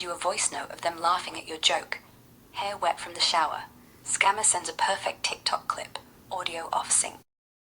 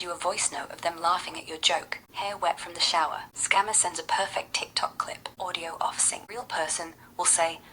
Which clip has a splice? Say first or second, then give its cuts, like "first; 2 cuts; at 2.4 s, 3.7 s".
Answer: second; 4 cuts; at 2.0 s, 3.3 s, 5.2 s, 6.2 s